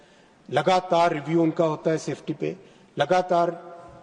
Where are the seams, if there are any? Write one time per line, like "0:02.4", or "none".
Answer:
none